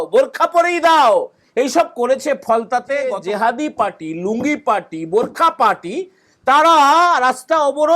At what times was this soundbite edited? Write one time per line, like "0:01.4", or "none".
0:03.2